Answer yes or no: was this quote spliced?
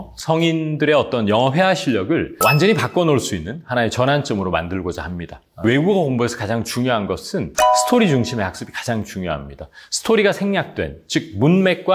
yes